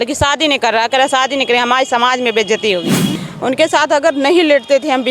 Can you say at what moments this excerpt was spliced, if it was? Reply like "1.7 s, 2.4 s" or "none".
3.2 s